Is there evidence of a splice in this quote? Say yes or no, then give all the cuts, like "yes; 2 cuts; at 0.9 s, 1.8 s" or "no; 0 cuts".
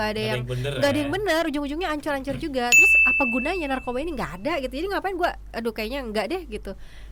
no; 0 cuts